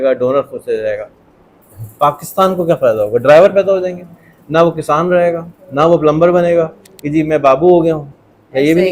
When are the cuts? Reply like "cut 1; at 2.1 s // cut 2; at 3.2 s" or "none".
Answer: none